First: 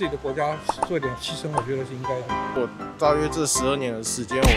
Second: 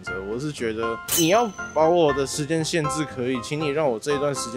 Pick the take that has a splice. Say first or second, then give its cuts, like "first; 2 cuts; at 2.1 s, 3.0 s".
first; 1 cut; at 2.4 s